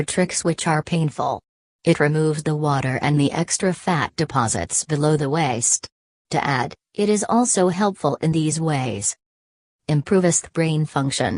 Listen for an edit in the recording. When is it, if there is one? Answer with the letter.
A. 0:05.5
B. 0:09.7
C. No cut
A